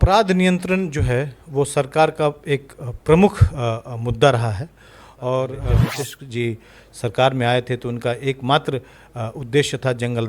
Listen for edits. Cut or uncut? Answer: cut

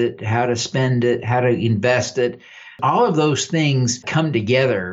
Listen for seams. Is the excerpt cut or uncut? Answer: cut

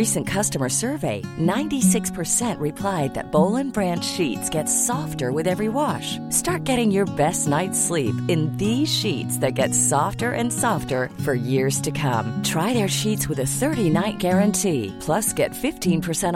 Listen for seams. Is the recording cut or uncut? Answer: uncut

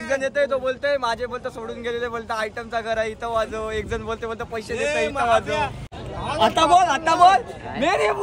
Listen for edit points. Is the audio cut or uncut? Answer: cut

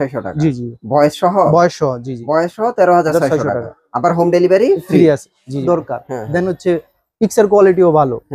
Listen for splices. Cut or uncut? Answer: cut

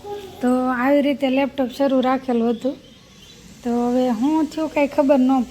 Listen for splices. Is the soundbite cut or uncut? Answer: uncut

